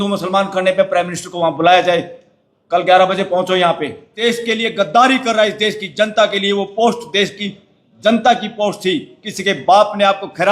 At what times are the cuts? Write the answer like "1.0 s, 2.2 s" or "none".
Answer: 4.1 s